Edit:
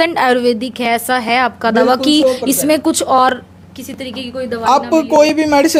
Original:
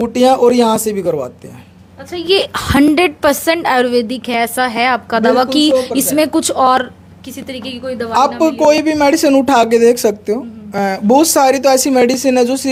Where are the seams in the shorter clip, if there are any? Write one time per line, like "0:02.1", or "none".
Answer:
none